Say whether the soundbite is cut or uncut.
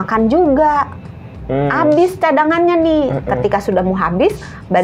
uncut